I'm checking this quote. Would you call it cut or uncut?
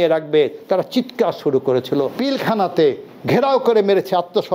cut